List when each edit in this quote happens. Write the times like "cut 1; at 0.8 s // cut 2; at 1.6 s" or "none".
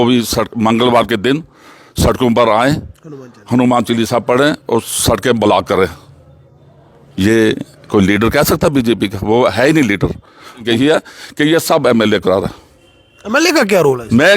cut 1; at 10.6 s

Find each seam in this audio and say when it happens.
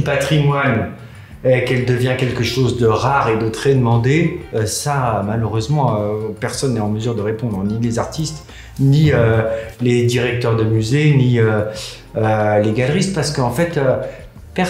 none

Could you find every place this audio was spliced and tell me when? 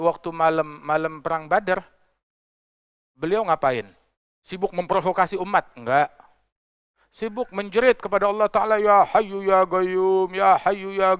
none

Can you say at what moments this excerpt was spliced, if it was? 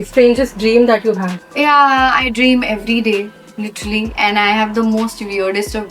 cut 1; at 1.4 s

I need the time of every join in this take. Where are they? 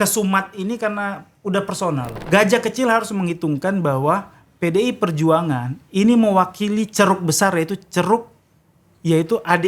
cut 1; at 2.1 s

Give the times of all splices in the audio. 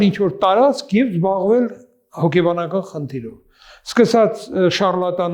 none

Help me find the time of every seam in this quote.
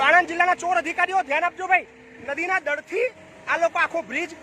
cut 1; at 2.3 s

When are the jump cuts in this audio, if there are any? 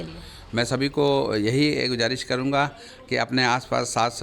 none

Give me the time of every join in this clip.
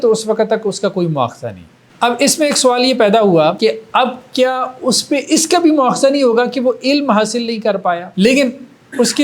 cut 1; at 3.7 s // cut 2; at 8.1 s

